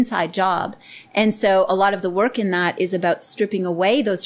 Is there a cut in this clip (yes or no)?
no